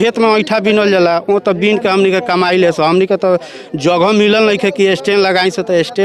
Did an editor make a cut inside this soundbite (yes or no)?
no